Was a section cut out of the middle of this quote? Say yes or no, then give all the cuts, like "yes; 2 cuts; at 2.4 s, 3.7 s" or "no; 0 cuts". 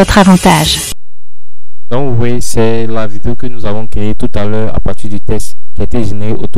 no; 0 cuts